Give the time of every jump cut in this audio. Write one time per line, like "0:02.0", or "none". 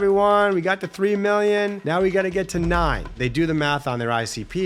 0:01.8
0:03.2